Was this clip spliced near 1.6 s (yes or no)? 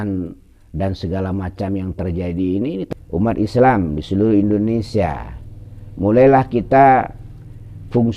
no